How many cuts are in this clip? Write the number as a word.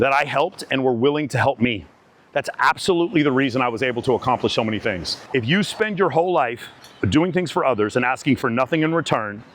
two